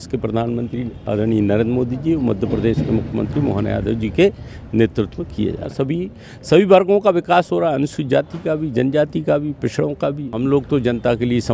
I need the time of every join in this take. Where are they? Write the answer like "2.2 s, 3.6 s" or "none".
5.7 s, 10.4 s